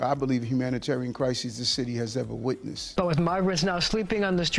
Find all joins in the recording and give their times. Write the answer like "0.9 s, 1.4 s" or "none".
2.7 s